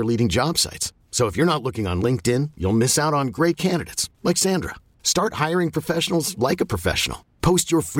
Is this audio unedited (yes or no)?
yes